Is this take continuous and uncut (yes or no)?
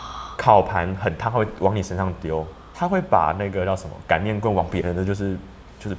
no